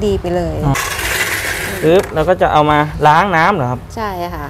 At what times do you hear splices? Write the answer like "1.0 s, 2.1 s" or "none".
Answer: 1.2 s